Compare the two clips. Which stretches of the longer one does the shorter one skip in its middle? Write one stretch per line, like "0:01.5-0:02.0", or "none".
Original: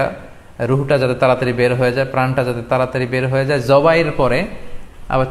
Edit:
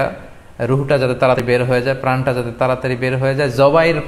0:01.4-0:01.5